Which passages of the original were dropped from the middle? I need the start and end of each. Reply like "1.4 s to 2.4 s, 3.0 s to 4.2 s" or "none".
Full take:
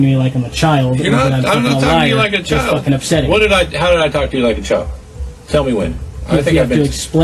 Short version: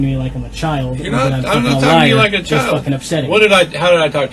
none

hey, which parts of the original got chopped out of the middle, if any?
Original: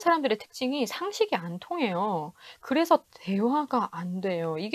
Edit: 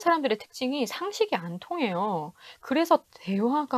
none

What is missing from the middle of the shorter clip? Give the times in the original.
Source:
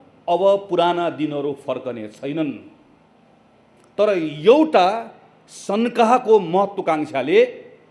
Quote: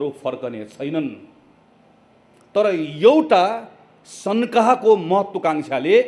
none

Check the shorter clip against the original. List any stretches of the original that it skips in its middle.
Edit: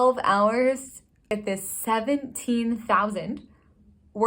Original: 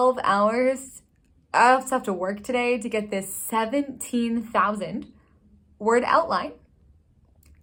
1.3 s to 2.9 s

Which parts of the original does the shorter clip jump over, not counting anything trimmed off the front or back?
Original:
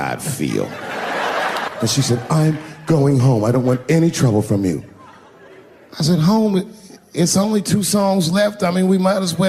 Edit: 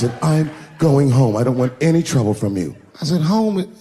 4.9 s to 5.8 s

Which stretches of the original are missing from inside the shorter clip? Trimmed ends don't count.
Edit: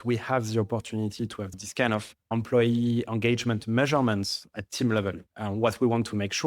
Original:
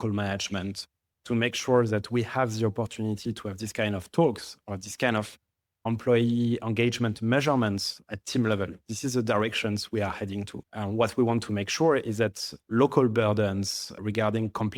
3.6 s to 4.7 s, 5.4 s to 5.7 s, 8.8 s to 10.6 s

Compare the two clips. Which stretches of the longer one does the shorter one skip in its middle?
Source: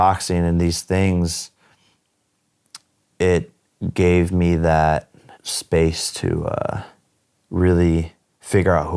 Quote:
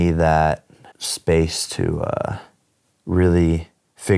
none

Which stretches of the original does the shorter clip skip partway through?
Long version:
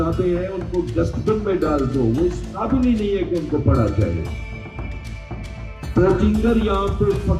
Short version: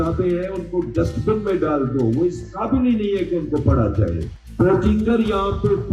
4.3 s to 5.7 s

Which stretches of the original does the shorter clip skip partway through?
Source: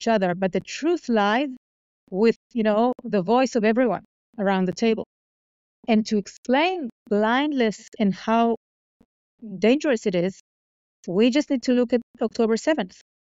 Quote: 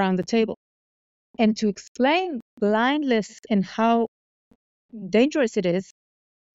none

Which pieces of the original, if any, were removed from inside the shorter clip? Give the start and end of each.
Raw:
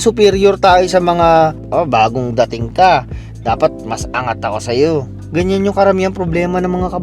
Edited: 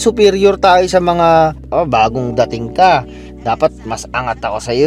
none

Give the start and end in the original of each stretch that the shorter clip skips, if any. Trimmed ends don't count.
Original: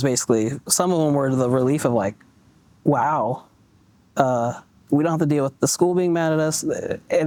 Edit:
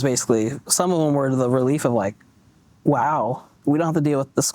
3.5 s to 4.7 s

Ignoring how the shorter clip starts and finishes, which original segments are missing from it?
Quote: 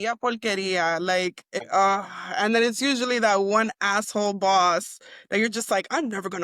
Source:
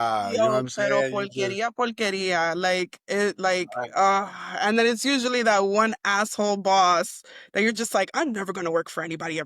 3.1 s to 3.8 s

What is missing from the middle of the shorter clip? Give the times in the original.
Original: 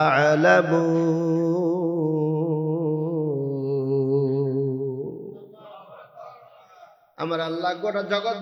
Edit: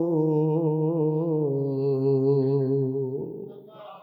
none

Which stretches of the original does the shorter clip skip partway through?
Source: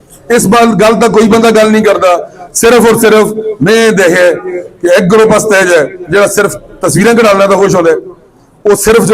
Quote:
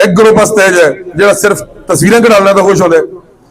none

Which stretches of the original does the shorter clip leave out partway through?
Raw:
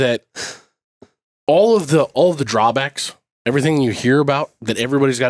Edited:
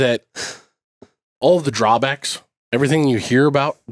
1.4 s to 2.1 s

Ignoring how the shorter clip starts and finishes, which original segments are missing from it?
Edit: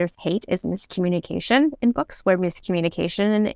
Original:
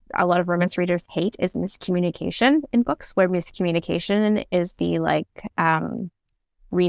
none

